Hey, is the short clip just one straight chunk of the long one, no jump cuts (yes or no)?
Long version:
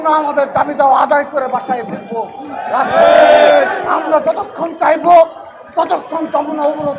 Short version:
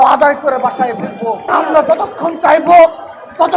no